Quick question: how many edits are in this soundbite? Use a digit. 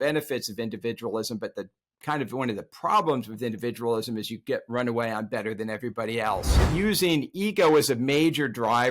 1